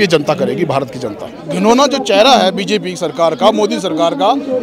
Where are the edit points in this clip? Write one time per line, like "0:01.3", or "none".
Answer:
0:01.4